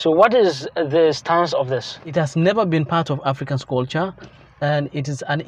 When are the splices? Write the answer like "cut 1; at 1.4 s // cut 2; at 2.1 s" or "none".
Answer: cut 1; at 2.1 s